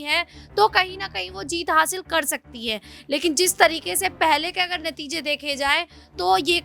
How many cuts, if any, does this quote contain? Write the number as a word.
zero